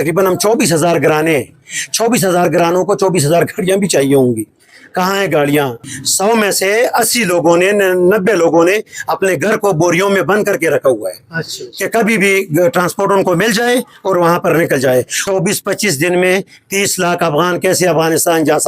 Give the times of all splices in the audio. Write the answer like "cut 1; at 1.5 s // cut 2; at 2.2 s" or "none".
cut 1; at 5.8 s // cut 2; at 15.2 s